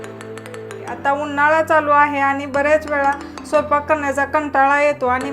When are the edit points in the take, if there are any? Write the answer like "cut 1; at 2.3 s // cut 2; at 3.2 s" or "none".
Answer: cut 1; at 0.9 s